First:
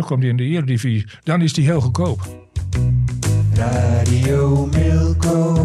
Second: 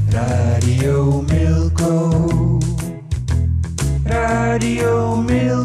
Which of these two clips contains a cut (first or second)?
first